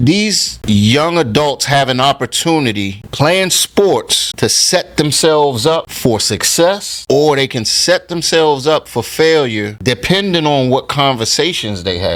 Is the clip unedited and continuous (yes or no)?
yes